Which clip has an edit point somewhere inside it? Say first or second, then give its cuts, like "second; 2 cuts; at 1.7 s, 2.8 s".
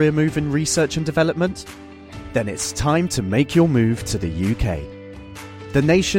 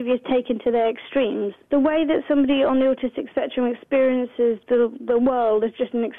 second; 1 cut; at 1.6 s